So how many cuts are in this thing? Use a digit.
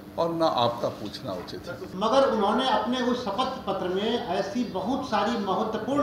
1